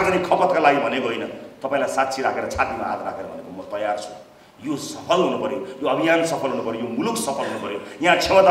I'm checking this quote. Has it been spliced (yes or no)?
no